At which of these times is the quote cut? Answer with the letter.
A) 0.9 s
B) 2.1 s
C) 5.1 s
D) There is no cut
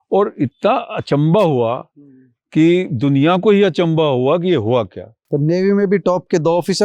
C